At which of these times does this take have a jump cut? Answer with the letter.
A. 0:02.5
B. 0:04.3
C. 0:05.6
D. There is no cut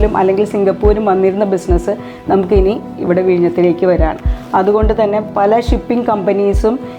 B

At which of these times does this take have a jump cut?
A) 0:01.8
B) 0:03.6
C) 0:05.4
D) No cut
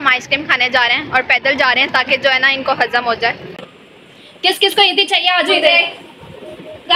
B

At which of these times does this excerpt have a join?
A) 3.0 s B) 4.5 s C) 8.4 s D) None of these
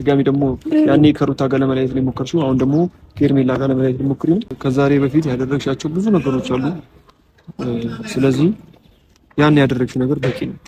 B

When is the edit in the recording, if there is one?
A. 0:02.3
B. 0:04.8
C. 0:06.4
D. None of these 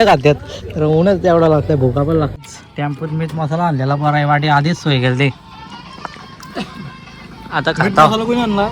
A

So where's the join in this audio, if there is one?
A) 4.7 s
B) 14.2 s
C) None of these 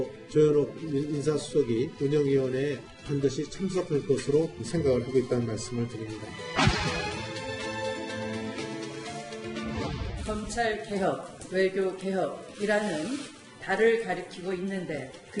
C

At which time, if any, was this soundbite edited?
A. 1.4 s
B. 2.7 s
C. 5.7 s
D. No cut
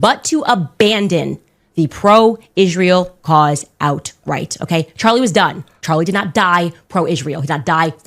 C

